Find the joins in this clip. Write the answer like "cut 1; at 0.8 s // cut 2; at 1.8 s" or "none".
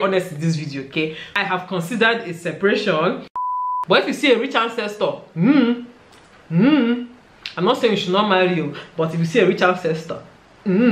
cut 1; at 1.3 s // cut 2; at 3.5 s